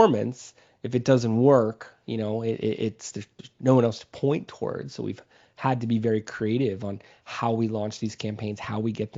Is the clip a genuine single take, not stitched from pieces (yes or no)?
yes